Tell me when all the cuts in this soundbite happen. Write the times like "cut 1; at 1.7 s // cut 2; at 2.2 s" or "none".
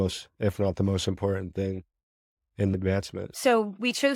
cut 1; at 2.7 s